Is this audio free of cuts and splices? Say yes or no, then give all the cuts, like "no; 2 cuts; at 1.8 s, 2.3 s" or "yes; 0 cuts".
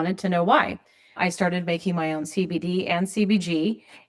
no; 1 cut; at 1.1 s